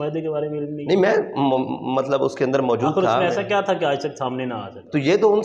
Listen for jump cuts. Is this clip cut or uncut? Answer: uncut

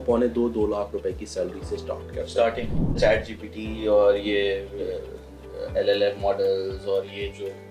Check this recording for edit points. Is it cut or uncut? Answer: cut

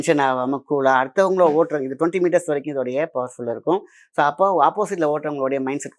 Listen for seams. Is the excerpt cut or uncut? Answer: uncut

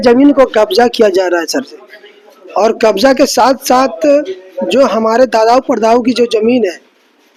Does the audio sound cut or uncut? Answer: uncut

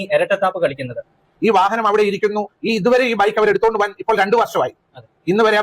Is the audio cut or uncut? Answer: cut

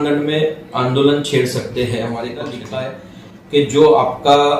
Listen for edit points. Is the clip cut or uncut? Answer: cut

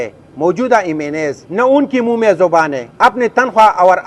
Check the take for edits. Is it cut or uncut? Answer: cut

